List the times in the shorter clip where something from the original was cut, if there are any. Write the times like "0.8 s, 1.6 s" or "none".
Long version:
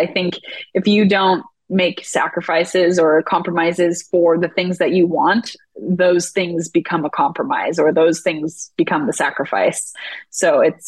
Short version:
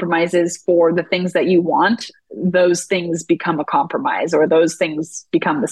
none